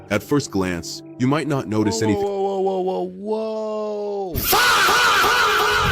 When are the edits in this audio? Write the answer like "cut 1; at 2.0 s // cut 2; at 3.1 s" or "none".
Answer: none